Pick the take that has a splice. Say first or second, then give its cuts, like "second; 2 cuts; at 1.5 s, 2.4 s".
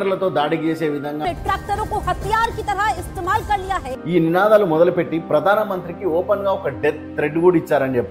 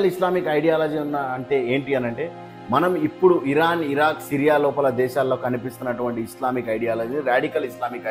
first; 2 cuts; at 1.2 s, 3.9 s